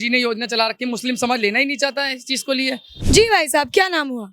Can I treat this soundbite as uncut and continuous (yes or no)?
no